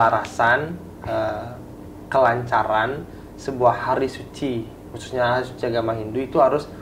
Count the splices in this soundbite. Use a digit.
0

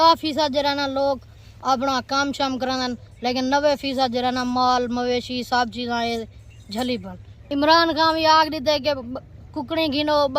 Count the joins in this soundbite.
1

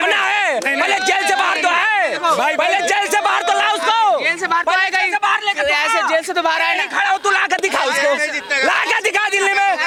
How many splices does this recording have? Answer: 0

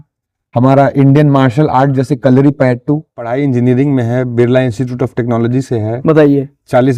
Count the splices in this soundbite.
1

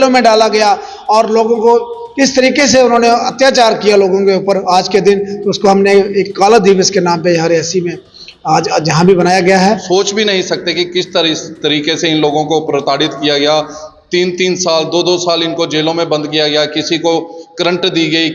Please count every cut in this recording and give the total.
1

